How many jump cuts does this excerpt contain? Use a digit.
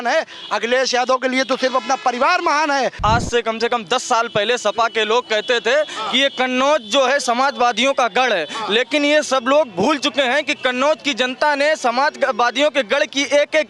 1